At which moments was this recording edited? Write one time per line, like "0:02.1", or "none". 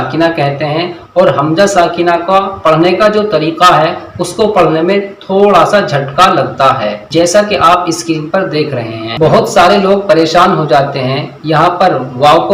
0:07.0